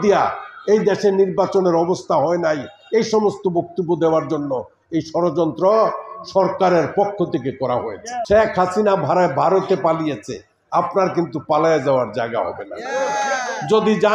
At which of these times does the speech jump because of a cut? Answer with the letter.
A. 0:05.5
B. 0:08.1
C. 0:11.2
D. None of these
B